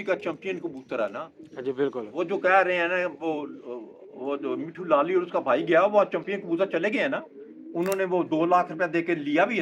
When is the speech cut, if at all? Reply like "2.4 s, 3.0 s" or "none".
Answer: none